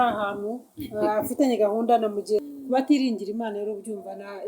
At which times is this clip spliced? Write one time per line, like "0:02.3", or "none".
0:02.5